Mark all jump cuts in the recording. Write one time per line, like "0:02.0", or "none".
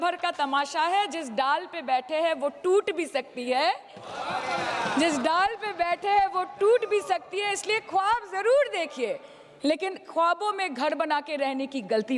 none

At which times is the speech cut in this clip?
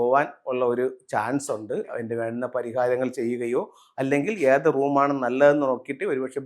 0:01.9

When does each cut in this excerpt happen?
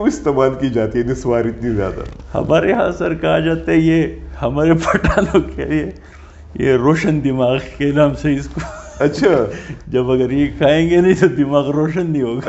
none

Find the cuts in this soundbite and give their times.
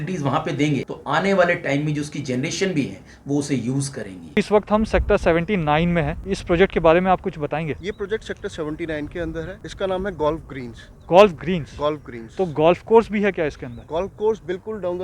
0:00.9
0:04.4
0:06.2
0:07.8
0:09.6

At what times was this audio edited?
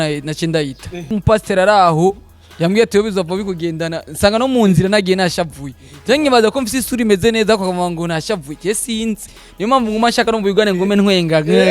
0:01.0

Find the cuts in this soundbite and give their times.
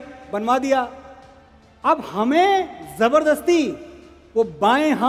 none

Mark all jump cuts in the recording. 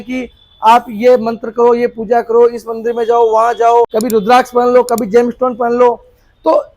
0:03.9

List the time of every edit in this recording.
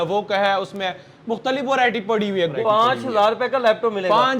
0:02.5

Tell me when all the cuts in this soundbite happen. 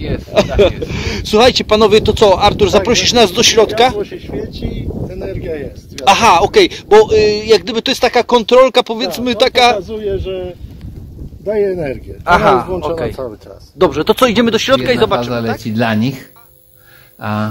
0:15.2

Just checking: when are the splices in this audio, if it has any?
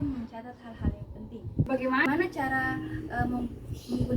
0:01.7

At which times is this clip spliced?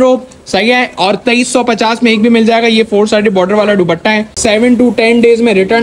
0:04.3

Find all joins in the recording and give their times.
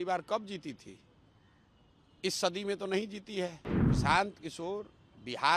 0:03.7

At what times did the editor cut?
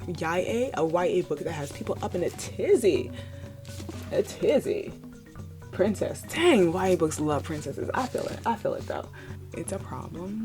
0:09.2

